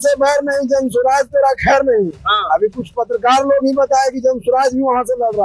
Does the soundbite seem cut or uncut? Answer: uncut